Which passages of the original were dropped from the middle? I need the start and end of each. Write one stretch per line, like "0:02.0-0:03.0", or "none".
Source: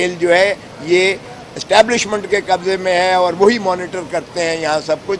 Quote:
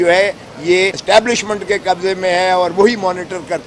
0:01.2-0:01.6